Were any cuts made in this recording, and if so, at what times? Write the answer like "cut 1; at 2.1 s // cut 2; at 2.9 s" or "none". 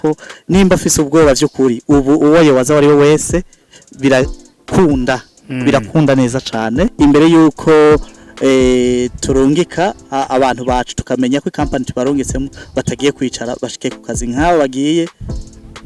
cut 1; at 6.9 s